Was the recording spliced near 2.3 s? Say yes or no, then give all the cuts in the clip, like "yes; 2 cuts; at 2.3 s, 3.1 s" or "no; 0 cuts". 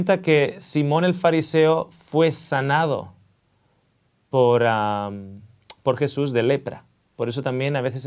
yes; 1 cut; at 2.3 s